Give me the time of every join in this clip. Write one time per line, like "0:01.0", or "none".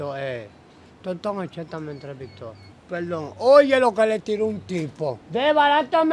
0:02.7
0:05.2